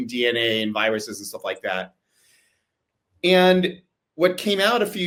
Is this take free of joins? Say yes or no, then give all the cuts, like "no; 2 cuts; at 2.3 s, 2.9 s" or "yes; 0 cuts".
yes; 0 cuts